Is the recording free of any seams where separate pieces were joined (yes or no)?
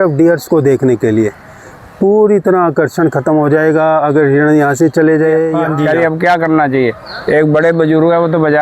no